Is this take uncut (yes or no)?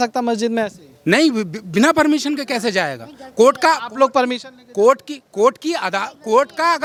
yes